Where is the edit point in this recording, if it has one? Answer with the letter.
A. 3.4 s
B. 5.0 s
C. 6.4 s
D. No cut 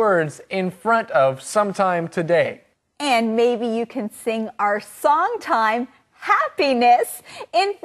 C